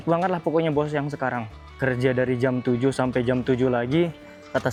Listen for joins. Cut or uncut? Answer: uncut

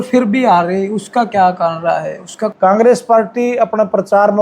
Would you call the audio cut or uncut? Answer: cut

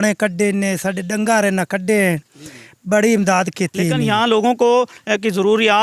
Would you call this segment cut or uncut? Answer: cut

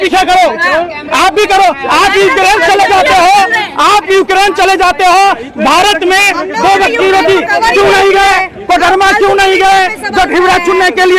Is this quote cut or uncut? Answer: uncut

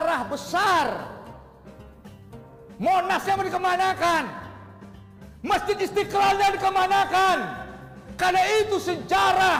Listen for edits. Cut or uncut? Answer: uncut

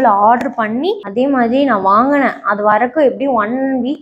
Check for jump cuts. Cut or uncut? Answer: uncut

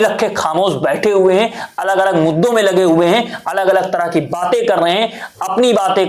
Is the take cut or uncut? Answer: uncut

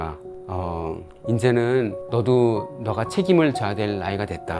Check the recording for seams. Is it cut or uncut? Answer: uncut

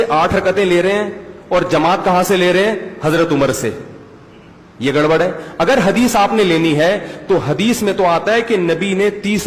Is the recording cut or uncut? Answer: uncut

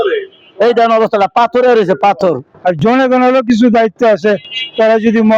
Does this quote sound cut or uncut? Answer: cut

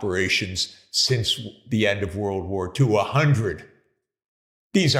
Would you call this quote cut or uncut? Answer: uncut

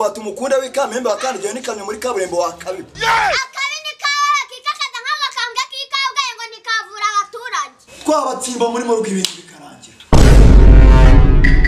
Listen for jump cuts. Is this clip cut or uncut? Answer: cut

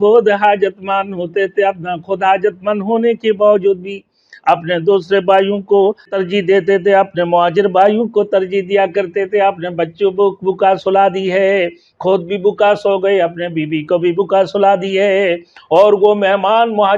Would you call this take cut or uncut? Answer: cut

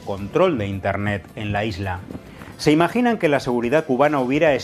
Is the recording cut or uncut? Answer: uncut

